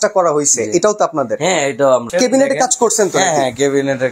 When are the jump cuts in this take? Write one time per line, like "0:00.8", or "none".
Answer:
0:02.0

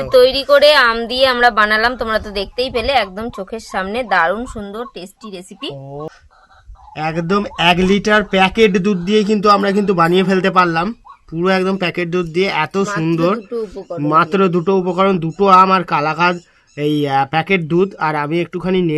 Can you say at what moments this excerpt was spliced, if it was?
0:06.1

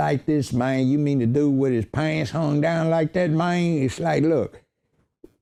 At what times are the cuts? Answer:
none

